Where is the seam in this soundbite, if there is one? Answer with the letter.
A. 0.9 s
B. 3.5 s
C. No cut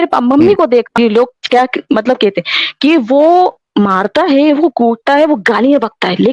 A